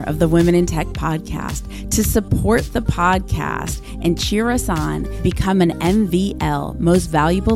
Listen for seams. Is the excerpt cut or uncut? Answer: uncut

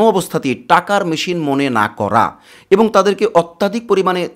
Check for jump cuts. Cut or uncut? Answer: uncut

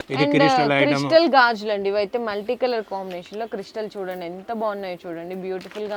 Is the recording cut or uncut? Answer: uncut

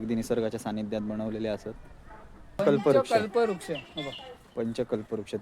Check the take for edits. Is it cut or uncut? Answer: cut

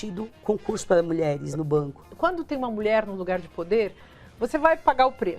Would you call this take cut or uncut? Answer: cut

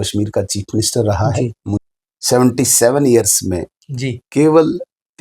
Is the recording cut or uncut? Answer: cut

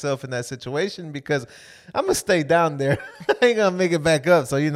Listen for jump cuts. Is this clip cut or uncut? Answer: uncut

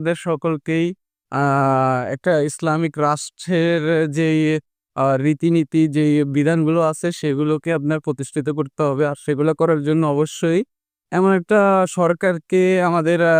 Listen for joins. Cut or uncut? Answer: uncut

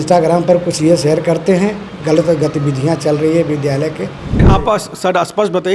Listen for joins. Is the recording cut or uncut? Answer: cut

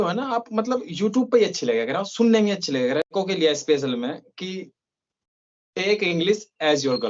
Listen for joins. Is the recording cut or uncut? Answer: cut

